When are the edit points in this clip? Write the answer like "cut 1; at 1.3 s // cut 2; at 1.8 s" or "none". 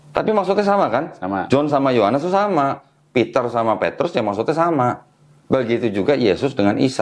none